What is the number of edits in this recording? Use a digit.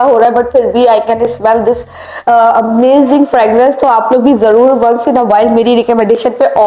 0